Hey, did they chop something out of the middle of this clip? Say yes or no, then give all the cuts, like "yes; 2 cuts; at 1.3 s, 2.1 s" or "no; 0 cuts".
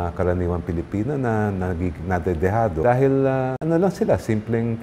yes; 2 cuts; at 2.8 s, 3.6 s